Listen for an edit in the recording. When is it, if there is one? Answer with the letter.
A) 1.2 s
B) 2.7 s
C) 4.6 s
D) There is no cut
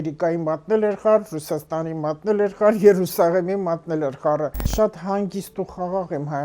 C